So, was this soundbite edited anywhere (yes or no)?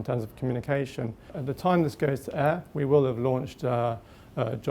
yes